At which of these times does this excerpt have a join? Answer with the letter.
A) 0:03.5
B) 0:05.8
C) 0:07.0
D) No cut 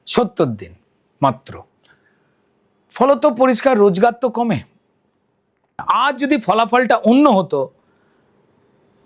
B